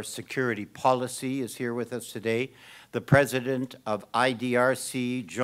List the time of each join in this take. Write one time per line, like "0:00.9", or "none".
none